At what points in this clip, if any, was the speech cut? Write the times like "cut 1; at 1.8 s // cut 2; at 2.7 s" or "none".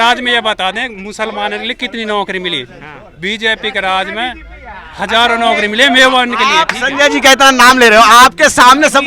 none